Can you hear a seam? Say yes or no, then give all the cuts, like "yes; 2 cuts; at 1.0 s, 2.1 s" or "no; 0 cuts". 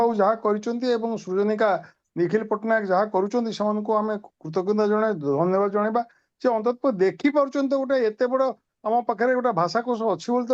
no; 0 cuts